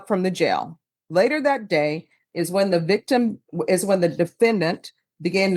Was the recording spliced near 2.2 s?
no; 1 cut; at 1.0 s

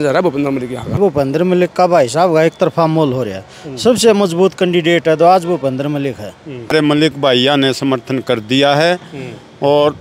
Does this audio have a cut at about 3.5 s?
no; 2 cuts; at 0.9 s, 6.7 s

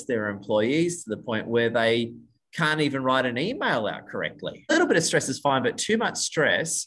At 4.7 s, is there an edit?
yes; 1 cut; at 4.7 s

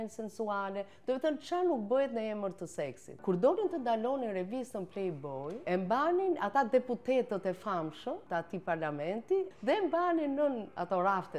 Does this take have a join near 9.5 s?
yes; 4 cuts; at 3.1 s, 5.6 s, 8.2 s, 9.5 s

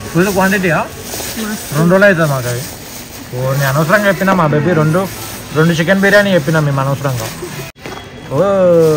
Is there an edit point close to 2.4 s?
no; 1 cut; at 7.7 s

